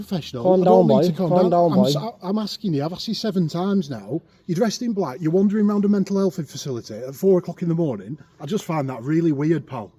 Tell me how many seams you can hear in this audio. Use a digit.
0